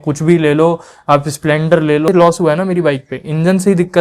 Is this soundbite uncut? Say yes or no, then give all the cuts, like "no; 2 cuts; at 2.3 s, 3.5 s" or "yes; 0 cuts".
no; 1 cut; at 2.1 s